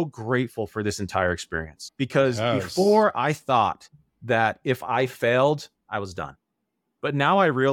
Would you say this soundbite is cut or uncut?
cut